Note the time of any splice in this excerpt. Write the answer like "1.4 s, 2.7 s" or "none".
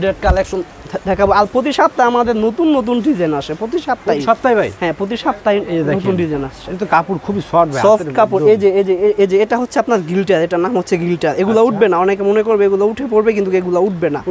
none